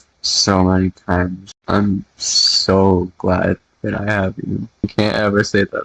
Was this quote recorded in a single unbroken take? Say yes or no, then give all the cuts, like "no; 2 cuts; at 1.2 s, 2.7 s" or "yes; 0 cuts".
no; 2 cuts; at 1.5 s, 4.9 s